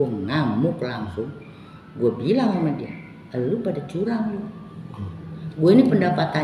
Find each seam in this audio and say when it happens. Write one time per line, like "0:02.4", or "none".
none